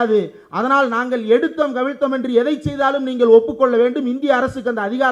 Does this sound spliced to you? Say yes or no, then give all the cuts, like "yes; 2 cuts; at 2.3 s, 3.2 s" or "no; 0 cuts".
no; 0 cuts